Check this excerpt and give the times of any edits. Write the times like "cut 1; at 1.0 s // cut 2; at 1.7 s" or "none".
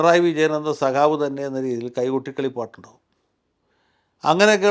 none